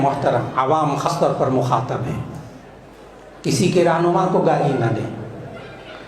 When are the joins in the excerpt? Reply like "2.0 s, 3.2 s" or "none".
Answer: 1.1 s